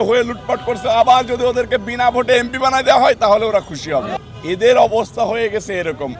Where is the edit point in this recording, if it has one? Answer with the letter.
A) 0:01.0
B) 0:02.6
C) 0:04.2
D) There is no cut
C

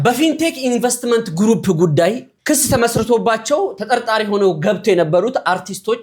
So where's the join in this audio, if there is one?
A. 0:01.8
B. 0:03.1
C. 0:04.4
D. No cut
D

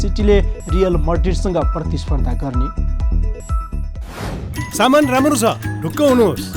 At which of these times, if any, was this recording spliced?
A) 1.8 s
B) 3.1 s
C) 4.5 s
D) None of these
C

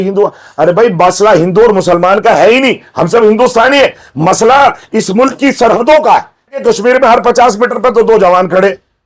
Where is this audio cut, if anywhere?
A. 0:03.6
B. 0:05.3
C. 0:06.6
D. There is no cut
C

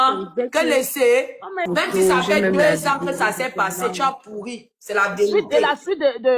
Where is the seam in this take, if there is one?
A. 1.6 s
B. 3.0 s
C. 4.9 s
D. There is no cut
A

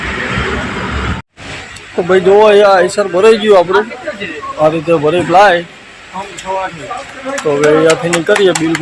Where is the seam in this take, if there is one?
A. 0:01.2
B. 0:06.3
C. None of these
A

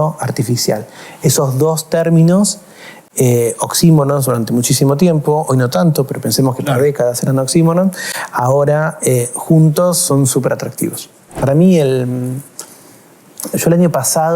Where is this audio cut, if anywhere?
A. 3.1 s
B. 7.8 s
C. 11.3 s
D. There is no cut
C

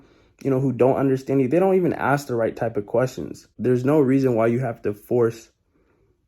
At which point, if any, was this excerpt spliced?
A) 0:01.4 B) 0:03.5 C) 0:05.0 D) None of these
B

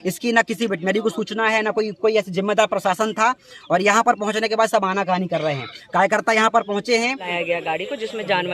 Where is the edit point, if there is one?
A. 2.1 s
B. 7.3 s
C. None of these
B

